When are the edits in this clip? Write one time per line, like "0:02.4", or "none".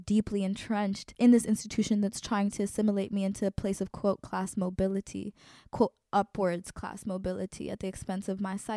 0:01.0